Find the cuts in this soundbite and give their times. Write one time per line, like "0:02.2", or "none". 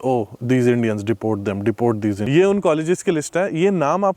0:02.3